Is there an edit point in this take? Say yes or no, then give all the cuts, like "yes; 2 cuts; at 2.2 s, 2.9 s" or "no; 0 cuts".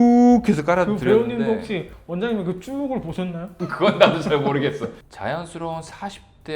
yes; 1 cut; at 5.1 s